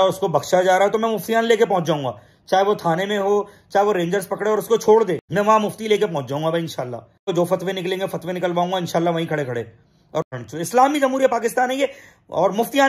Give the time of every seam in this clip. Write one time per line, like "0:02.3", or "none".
0:05.2
0:07.3
0:10.3